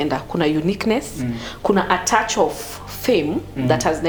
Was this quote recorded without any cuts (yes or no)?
yes